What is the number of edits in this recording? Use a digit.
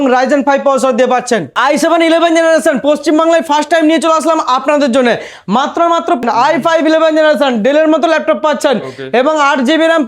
2